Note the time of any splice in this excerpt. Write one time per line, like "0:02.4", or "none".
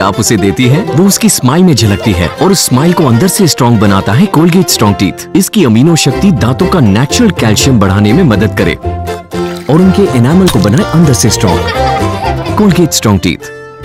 none